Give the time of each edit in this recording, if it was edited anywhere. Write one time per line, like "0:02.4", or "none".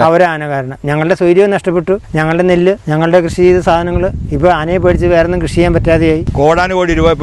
0:02.1
0:02.8
0:06.3